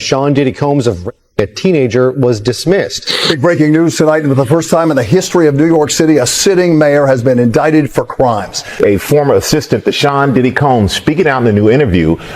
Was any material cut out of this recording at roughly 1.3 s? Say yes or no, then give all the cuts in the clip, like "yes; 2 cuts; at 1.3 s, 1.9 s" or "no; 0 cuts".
no; 2 cuts; at 3.2 s, 8.6 s